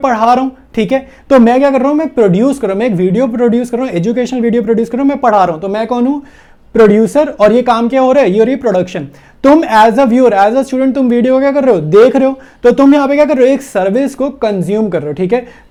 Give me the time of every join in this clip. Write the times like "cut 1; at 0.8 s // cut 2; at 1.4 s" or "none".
none